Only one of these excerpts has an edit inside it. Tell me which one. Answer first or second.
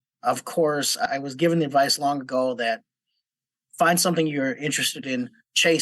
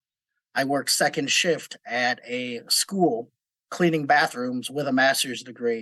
first